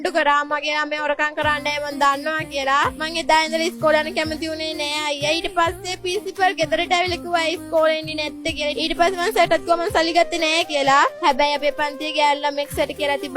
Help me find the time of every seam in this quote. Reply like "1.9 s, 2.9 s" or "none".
none